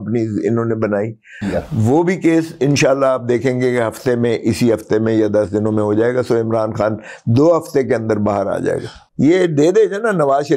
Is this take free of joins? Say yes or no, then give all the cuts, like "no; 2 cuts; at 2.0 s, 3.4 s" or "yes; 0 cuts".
no; 2 cuts; at 1.4 s, 8.9 s